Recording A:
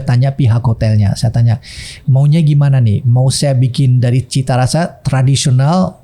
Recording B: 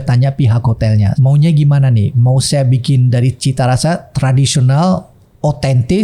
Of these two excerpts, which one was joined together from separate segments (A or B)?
B